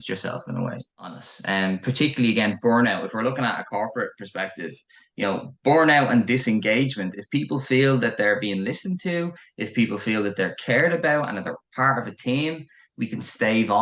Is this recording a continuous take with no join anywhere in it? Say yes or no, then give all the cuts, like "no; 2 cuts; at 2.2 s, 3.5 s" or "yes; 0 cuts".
no; 1 cut; at 1.3 s